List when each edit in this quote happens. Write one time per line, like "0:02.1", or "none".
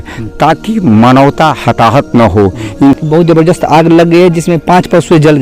0:03.0